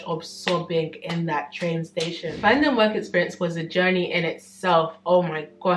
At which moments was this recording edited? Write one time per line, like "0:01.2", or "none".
0:02.4